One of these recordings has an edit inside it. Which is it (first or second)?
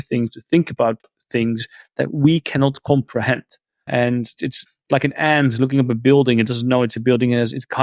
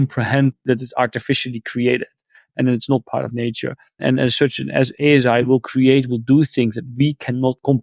second